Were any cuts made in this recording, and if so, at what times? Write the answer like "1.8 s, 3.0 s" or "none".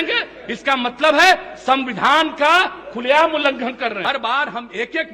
4.0 s